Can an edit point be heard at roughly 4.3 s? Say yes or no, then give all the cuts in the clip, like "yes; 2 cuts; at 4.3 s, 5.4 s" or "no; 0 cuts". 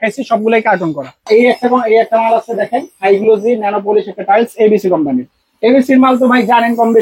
no; 1 cut; at 1.3 s